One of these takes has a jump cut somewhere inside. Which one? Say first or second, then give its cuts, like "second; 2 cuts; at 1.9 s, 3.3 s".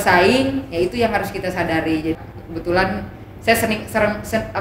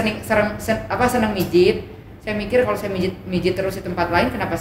first; 1 cut; at 2.1 s